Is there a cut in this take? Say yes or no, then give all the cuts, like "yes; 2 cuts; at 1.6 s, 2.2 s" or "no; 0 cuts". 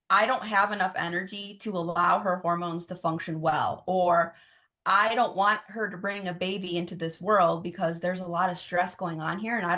no; 0 cuts